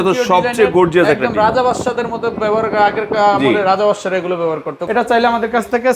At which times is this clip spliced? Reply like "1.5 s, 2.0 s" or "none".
4.8 s